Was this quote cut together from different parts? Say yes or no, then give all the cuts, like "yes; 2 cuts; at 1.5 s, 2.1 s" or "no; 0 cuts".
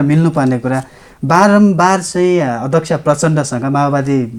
no; 0 cuts